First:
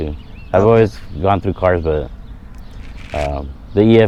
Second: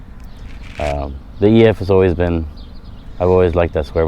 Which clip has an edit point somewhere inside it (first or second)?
second